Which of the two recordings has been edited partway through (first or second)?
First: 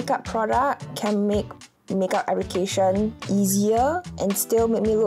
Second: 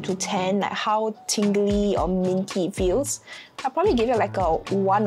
first